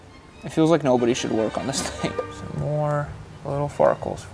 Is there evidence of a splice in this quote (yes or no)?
yes